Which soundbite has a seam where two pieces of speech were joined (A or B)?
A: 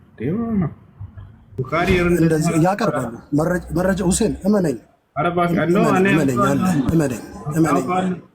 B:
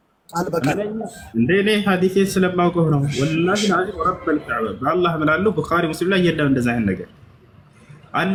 A